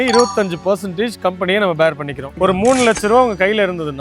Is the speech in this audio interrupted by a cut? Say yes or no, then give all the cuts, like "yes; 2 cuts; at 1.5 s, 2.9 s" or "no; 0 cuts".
yes; 1 cut; at 2.2 s